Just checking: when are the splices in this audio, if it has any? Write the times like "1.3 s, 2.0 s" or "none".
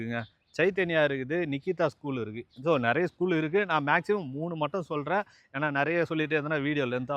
none